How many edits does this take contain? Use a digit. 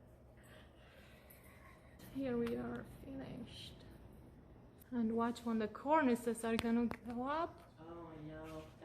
2